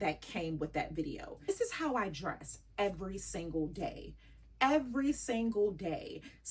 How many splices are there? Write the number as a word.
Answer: one